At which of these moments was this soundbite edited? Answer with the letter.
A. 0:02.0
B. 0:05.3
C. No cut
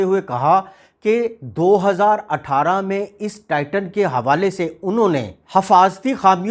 B